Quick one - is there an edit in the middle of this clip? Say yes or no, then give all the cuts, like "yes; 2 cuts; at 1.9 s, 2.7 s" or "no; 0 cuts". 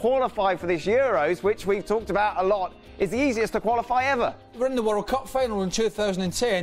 yes; 1 cut; at 1.6 s